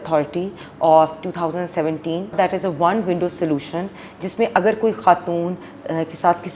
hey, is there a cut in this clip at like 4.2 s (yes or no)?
no